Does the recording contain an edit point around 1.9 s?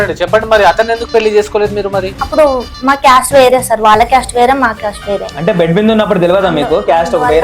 no; 1 cut; at 5.3 s

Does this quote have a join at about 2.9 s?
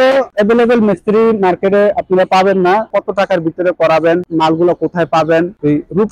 yes; 1 cut; at 2.9 s

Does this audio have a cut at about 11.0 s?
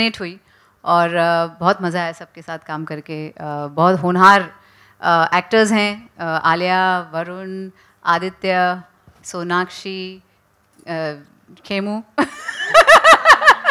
no; 0 cuts

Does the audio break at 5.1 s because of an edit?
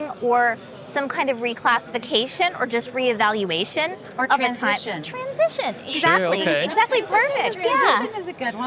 no; 0 cuts

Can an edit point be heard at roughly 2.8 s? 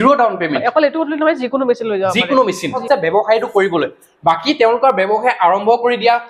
yes; 1 cut; at 2.8 s

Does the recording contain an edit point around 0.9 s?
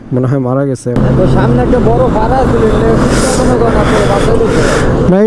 yes; 1 cut; at 0.9 s

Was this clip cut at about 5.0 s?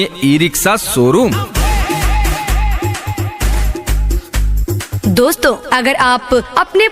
yes; 2 cuts; at 1.4 s, 5.0 s

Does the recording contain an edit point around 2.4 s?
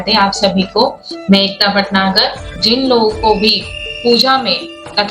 yes; 1 cut; at 2.4 s

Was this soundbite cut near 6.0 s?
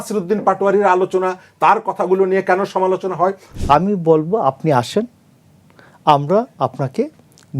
no; 1 cut; at 3.5 s

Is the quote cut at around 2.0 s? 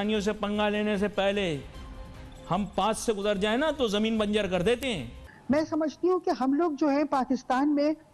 no; 1 cut; at 5.1 s

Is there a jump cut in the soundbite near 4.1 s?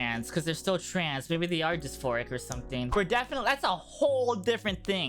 no; 1 cut; at 2.9 s

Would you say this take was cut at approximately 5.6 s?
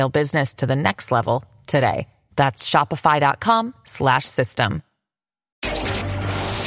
yes; 1 cut; at 5.6 s

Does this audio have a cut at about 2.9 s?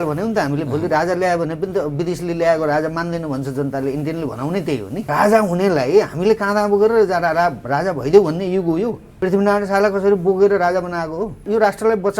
no; 3 cuts; at 5.1 s, 9.0 s, 11.4 s

